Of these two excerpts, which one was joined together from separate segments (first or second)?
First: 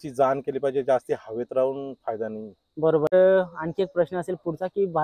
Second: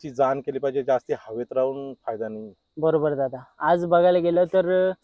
first